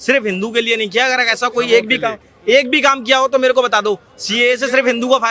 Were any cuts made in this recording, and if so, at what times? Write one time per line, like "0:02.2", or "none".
none

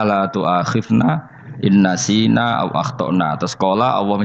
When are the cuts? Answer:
none

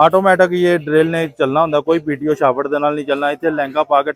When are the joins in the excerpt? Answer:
none

